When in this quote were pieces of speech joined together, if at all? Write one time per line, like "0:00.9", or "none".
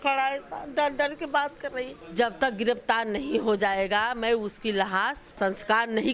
0:02.0
0:05.2